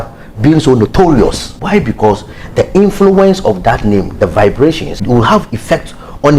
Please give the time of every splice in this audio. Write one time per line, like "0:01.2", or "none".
0:01.5
0:05.0